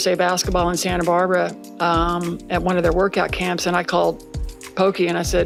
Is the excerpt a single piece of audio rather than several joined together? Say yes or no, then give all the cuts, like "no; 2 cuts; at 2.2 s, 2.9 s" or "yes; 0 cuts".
yes; 0 cuts